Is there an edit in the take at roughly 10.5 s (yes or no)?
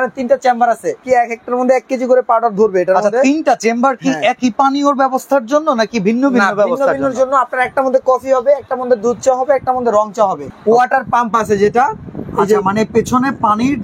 yes